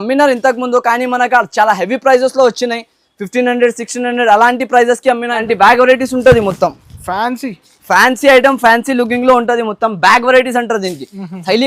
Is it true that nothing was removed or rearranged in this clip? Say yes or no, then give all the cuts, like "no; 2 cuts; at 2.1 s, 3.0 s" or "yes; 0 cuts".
no; 1 cut; at 5.4 s